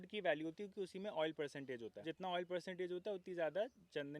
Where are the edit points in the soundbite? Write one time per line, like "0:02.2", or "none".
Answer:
0:02.0